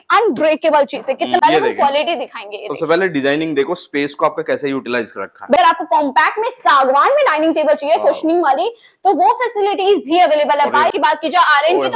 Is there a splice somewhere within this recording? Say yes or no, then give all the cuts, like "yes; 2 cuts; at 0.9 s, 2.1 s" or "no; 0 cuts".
yes; 3 cuts; at 1.4 s, 5.6 s, 10.9 s